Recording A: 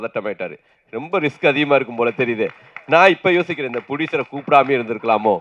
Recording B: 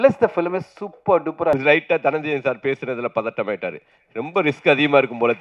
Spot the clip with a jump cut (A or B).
B